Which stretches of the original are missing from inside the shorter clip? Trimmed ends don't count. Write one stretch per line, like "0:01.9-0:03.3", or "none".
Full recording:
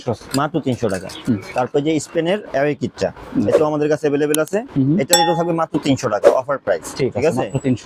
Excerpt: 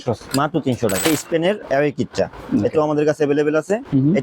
0:01.1-0:01.9